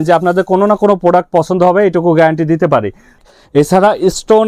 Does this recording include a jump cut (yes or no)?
yes